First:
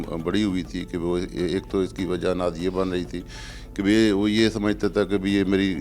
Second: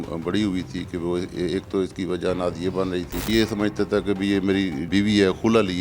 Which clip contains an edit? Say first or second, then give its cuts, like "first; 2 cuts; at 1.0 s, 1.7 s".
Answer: second; 2 cuts; at 3.3 s, 4.9 s